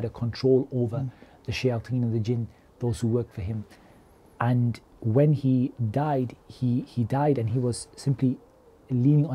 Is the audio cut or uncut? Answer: uncut